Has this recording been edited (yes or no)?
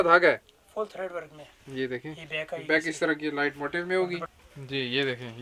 yes